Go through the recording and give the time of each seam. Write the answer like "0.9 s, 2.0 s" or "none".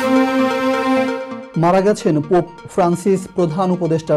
1.0 s